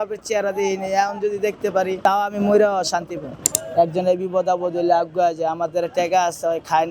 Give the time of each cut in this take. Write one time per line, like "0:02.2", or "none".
0:02.0
0:03.6